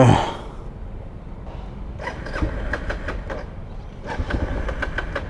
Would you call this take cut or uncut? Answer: uncut